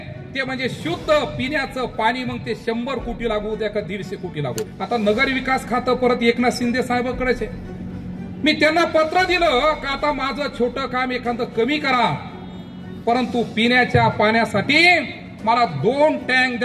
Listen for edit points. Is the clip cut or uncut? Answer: cut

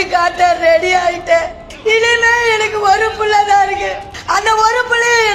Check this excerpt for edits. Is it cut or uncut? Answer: cut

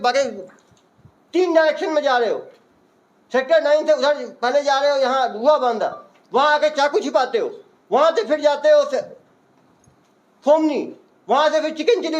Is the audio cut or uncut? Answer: uncut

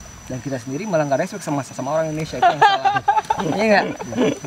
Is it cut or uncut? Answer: uncut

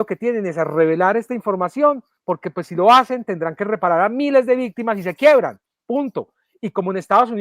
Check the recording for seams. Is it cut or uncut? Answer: cut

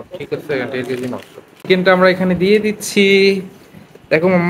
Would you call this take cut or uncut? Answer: cut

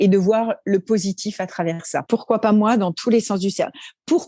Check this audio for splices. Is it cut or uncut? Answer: cut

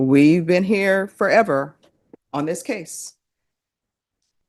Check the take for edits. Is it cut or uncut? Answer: uncut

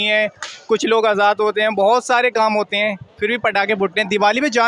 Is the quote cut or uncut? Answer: uncut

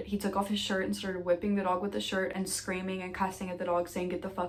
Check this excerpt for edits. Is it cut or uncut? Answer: uncut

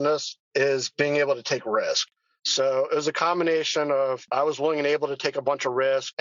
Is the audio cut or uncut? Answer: cut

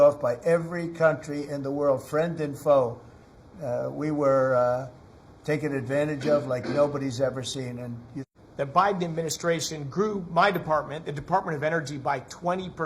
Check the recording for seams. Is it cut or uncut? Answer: cut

